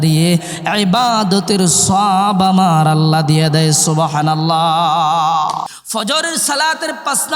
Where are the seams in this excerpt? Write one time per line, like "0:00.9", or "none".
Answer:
0:05.7